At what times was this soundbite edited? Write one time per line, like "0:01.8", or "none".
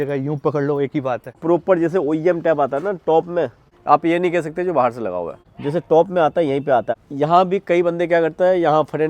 0:01.4
0:03.6
0:05.4
0:07.0